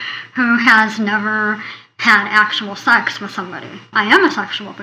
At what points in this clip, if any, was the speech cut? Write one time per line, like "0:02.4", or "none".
0:03.9

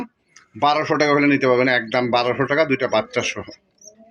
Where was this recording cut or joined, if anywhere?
none

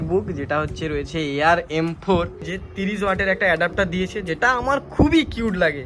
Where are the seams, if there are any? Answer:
0:02.5

